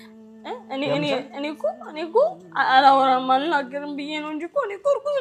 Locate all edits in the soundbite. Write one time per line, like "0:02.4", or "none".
none